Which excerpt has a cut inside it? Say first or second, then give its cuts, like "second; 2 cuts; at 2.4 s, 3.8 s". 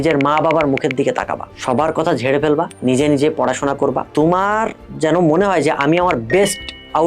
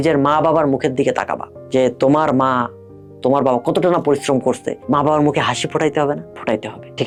first; 2 cuts; at 1.5 s, 2.7 s